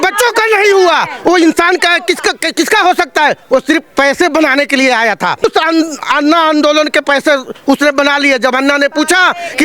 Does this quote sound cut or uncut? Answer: cut